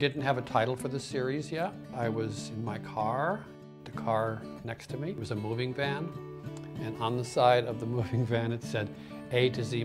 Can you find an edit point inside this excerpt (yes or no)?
yes